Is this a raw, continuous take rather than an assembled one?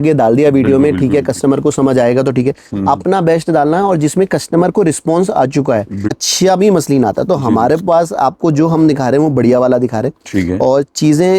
no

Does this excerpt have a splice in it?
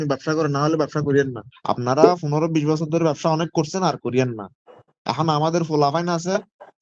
yes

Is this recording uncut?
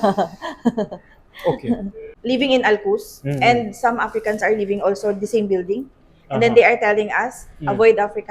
no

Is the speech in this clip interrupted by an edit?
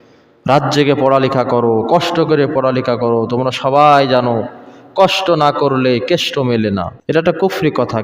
yes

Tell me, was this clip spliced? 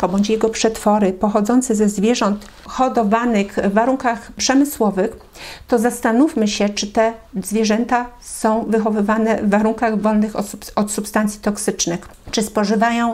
no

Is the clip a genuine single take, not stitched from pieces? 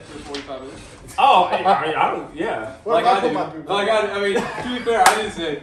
yes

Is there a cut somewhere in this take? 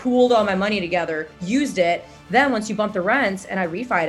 yes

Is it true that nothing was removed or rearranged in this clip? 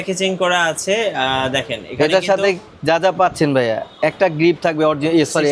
yes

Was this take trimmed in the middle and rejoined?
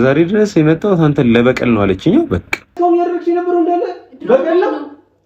yes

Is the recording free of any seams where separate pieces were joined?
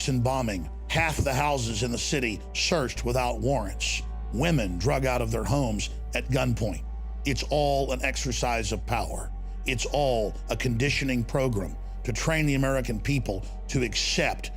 yes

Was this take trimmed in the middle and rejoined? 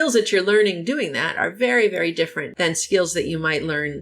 yes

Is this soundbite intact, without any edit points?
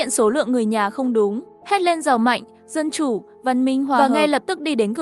no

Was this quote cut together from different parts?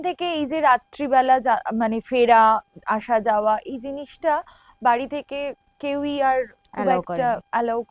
no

